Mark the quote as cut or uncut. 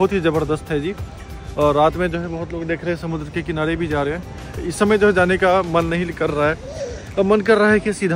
uncut